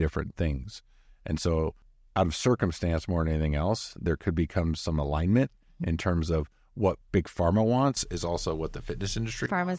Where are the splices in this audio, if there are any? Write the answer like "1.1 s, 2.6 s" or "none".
1.9 s